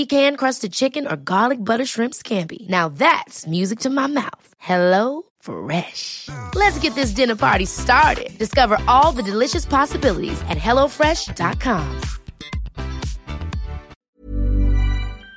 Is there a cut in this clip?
yes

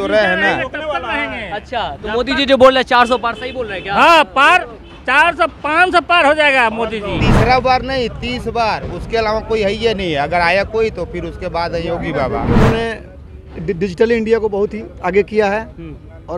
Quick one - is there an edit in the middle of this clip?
yes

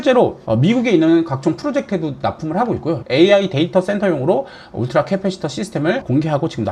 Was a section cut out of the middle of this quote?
no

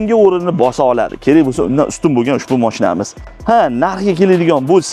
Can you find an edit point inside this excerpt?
no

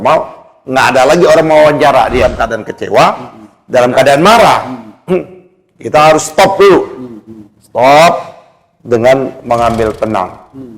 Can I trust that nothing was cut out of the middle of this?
no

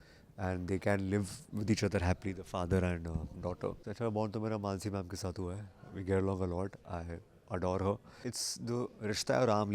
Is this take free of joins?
no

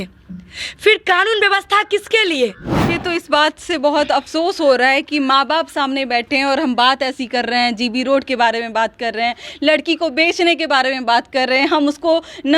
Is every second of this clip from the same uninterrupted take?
no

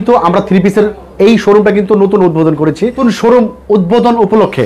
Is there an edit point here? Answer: yes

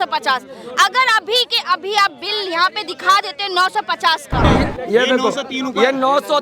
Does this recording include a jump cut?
yes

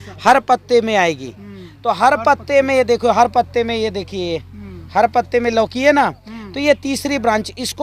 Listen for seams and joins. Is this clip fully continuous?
yes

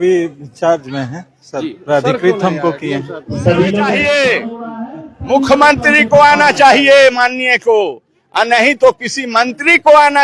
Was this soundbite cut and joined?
yes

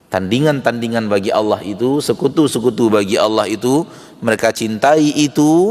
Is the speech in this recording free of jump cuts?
yes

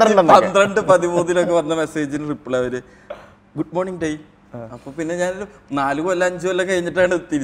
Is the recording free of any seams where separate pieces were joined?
yes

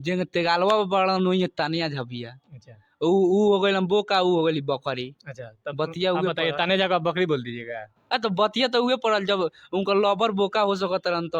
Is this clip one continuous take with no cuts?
yes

